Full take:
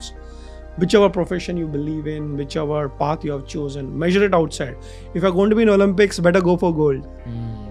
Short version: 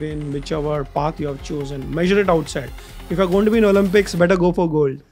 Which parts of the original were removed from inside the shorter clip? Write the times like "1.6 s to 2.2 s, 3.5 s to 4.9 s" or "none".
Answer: none